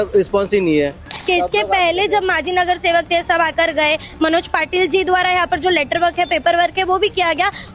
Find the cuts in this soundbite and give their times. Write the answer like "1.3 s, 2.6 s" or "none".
1.1 s